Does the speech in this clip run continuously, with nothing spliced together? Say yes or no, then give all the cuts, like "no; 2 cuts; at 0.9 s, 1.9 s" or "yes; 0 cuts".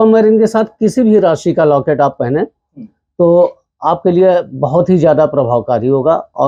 yes; 0 cuts